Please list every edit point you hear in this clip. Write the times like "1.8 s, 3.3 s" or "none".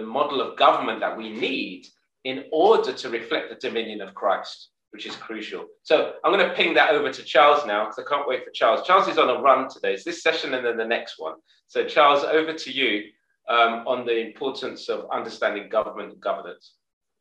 none